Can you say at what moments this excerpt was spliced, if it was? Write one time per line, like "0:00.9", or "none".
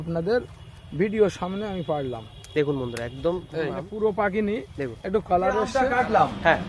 0:03.8
0:05.7